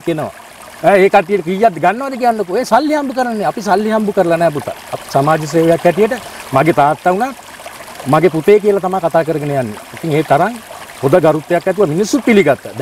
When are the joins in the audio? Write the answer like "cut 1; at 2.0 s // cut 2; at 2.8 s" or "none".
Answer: none

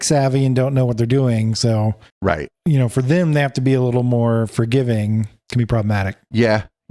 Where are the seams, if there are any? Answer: none

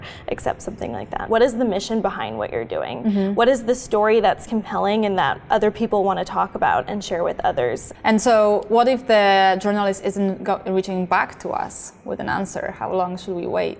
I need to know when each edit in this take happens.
cut 1; at 1.2 s // cut 2; at 7.9 s

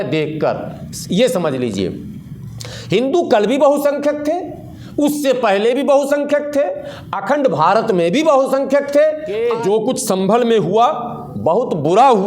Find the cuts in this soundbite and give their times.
cut 1; at 9.3 s

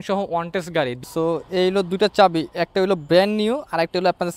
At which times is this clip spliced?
cut 1; at 1.0 s

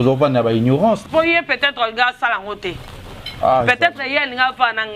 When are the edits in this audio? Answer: cut 1; at 1.0 s

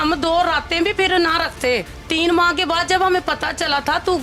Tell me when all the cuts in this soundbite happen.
cut 1; at 2.0 s

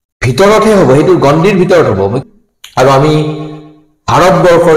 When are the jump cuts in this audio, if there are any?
cut 1; at 2.2 s

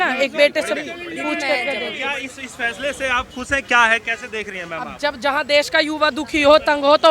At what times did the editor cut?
cut 1; at 2.0 s

